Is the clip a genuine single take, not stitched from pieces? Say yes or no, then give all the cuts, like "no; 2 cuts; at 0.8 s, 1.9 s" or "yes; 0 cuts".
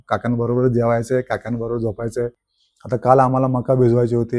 no; 1 cut; at 2.5 s